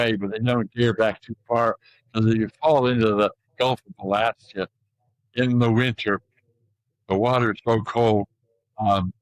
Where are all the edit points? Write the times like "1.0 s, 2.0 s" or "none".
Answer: none